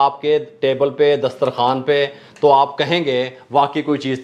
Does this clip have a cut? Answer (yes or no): no